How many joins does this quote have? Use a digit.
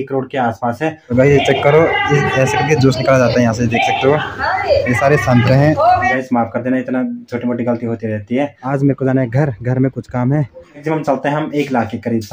4